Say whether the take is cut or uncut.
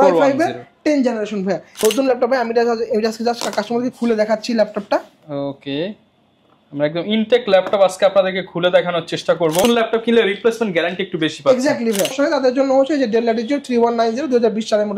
cut